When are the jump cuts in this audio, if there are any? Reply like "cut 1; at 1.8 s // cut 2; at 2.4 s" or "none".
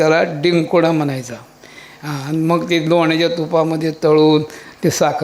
none